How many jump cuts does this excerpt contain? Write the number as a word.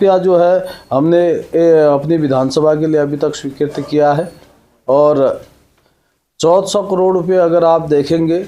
zero